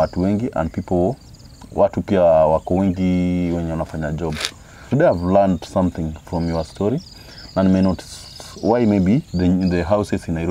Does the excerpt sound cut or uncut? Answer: cut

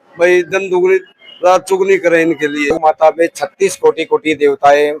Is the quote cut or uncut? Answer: cut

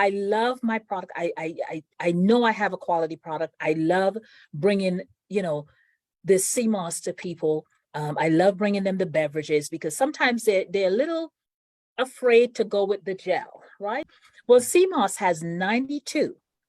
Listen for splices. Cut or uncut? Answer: cut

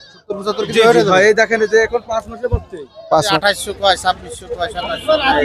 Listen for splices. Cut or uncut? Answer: cut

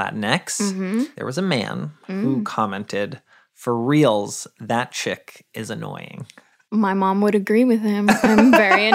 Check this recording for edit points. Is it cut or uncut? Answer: cut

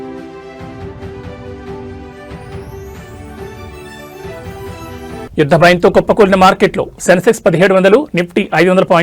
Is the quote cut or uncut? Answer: cut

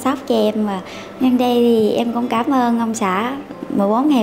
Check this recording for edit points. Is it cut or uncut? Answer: cut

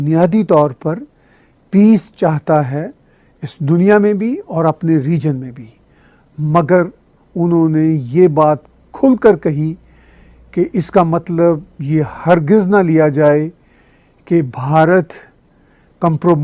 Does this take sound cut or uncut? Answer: uncut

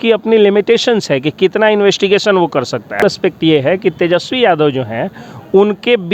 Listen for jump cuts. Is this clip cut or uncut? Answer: cut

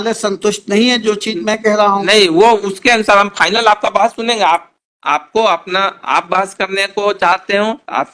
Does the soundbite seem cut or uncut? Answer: uncut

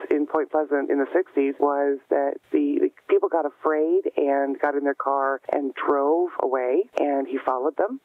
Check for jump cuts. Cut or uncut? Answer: cut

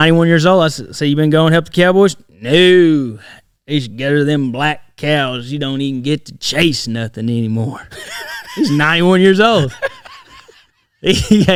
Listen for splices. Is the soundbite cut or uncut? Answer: uncut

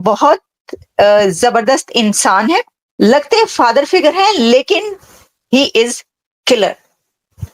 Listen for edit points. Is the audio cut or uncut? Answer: cut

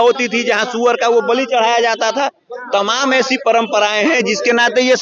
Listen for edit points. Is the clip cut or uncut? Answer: uncut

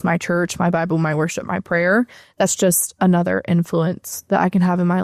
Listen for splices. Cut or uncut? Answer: uncut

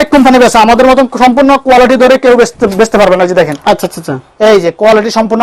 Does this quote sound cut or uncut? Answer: uncut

